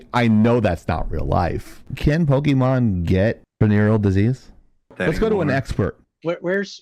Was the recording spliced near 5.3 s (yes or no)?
no